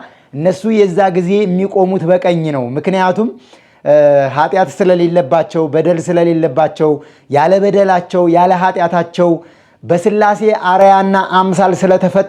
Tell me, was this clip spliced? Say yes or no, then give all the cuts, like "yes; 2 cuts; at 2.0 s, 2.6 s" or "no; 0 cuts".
no; 0 cuts